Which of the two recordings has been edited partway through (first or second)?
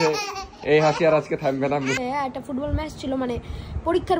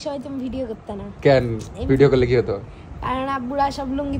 first